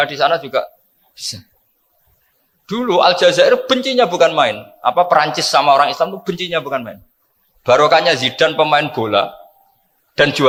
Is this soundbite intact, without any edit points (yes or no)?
yes